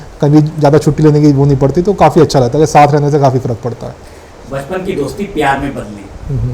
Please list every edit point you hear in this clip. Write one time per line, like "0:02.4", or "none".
none